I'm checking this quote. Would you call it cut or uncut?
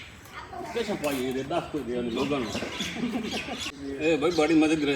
cut